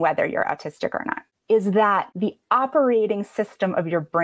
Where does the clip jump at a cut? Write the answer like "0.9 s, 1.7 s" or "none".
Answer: 2.1 s